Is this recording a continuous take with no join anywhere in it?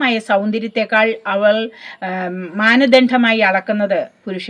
yes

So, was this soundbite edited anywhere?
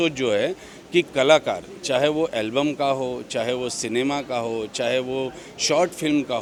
no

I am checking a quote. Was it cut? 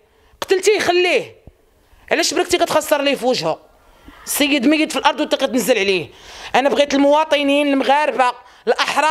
no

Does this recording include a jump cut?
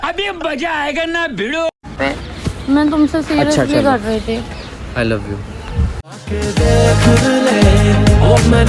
yes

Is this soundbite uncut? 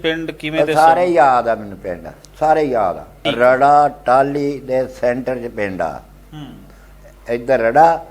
no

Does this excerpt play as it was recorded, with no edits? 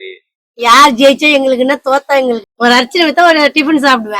no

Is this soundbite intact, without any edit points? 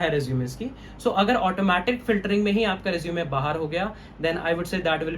yes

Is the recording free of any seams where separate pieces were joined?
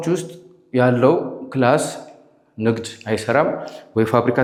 yes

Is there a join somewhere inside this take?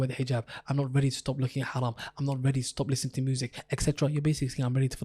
no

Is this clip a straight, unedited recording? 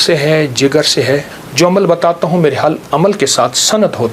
no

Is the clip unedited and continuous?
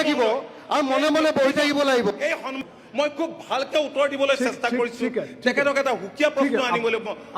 no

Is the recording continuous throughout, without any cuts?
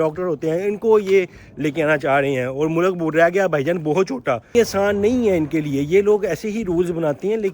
no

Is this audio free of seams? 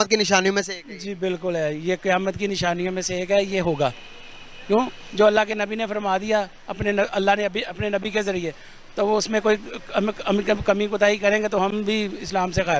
yes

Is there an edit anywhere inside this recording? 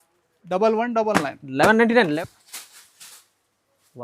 yes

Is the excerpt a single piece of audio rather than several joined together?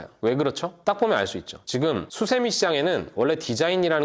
no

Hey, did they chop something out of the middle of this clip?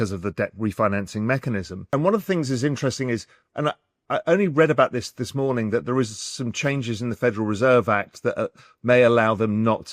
yes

